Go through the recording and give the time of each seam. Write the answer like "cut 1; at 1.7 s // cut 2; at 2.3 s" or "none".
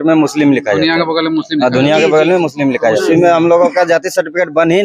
cut 1; at 3.0 s